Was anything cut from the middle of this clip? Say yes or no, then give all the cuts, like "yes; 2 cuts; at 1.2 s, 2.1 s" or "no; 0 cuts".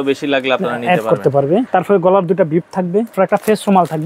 yes; 2 cuts; at 1.7 s, 3.1 s